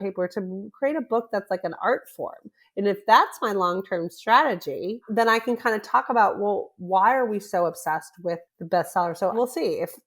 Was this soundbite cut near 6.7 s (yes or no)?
no